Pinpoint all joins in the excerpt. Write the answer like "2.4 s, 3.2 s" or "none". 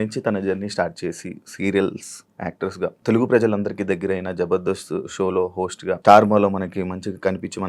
3.0 s, 6.0 s